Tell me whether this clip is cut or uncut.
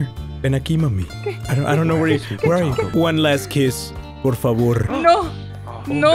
cut